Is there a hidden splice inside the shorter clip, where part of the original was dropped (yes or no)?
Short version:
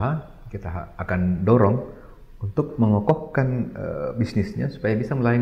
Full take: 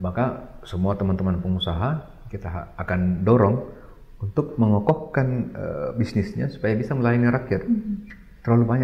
no